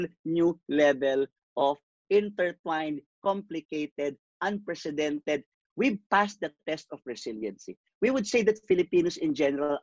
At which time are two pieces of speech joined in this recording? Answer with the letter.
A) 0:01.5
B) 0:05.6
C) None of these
B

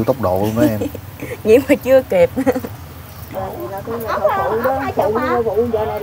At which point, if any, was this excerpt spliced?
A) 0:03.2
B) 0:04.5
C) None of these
A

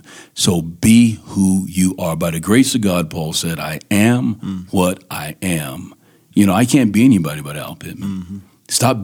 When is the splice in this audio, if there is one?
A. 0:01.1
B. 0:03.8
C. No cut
C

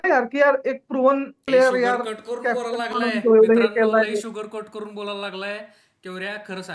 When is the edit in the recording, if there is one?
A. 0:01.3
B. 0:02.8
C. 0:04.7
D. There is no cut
A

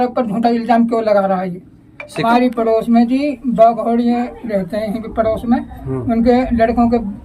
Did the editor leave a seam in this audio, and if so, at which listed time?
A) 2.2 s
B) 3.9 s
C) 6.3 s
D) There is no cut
A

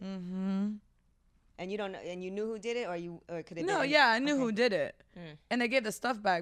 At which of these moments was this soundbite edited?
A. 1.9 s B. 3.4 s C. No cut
C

